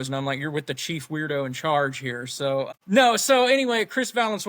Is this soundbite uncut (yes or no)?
no